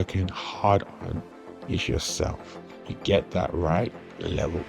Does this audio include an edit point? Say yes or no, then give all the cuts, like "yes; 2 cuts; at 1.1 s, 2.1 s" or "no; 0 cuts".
yes; 2 cuts; at 2.9 s, 3.8 s